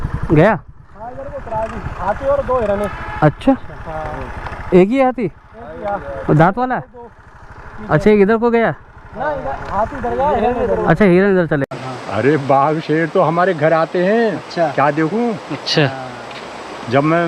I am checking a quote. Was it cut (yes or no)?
yes